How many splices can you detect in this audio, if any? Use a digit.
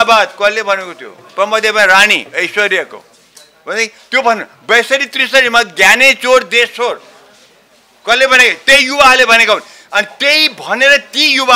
0